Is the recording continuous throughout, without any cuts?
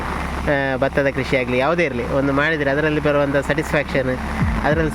yes; 0 cuts

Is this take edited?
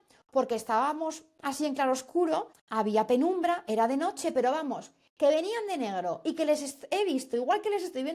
yes; 1 cut; at 2.6 s

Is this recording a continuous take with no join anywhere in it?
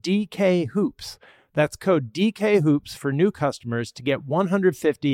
yes; 0 cuts

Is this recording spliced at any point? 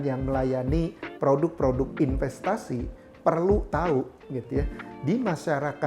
no; 0 cuts

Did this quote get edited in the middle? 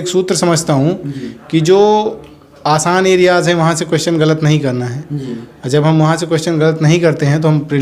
no; 0 cuts

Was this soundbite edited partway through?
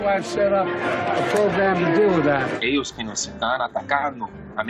yes; 1 cut; at 2.6 s

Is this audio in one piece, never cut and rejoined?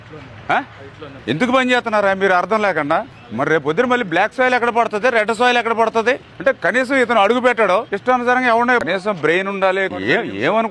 no; 2 cuts; at 8.8 s, 9.9 s

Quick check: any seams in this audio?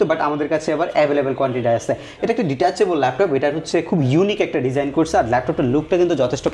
no; 0 cuts

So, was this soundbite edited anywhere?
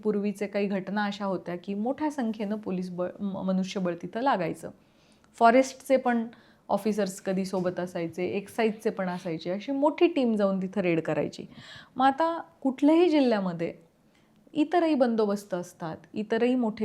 no; 0 cuts

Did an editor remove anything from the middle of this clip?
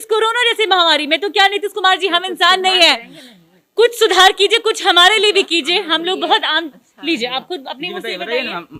no; 0 cuts

